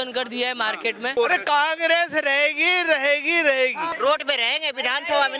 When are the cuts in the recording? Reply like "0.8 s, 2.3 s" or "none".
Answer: 1.1 s, 3.9 s